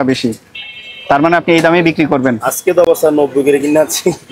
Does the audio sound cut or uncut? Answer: uncut